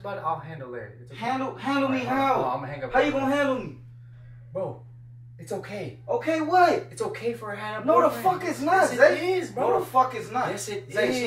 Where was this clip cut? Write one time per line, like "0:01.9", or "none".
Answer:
none